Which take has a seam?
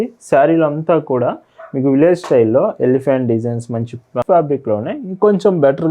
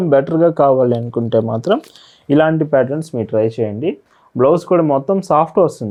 first; 1 cut; at 4.2 s

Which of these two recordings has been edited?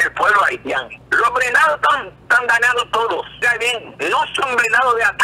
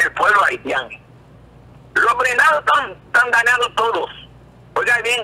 first; 2 cuts; at 1.0 s, 3.4 s

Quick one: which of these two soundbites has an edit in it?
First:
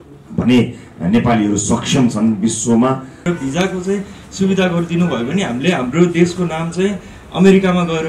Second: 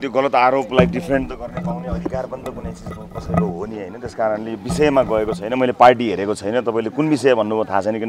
first; 1 cut; at 3.2 s

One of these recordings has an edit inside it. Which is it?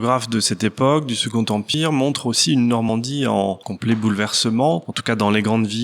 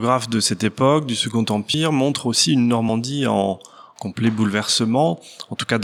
first; 2 cuts; at 3.7 s, 4.9 s

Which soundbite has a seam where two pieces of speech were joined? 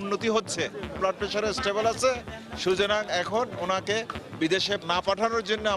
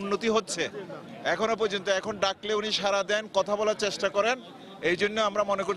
first; 2 cuts; at 1.0 s, 4.8 s

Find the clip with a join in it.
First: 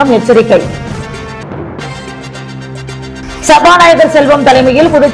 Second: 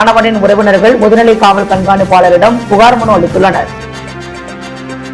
second; 1 cut; at 4.2 s

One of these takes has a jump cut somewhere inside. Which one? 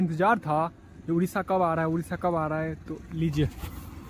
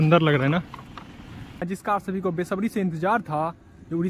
second; 1 cut; at 1.6 s

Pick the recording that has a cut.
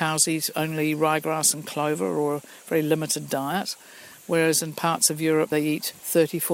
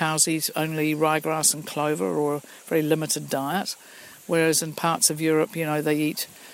first; 1 cut; at 5.6 s

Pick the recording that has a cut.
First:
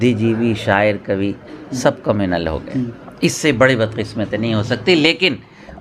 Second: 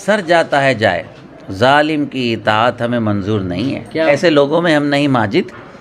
second; 1 cut; at 4.1 s

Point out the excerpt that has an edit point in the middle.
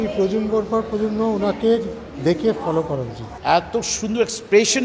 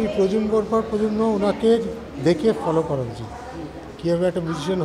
first; 1 cut; at 3.2 s

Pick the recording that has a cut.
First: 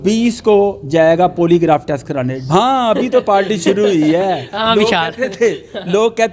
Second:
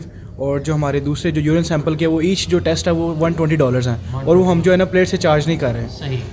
first; 1 cut; at 2.3 s

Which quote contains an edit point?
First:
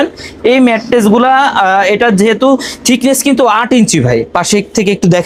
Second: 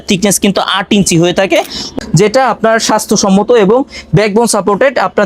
second; 1 cut; at 1.9 s

